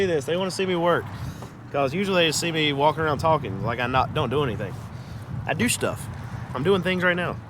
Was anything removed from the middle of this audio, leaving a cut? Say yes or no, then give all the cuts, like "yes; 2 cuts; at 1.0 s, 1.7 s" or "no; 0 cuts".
no; 0 cuts